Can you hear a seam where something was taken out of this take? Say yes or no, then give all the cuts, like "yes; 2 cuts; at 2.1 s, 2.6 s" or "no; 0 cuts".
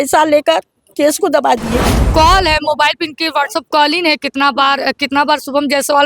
yes; 1 cut; at 2.0 s